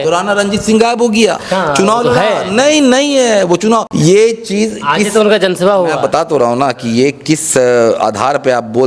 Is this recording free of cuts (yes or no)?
no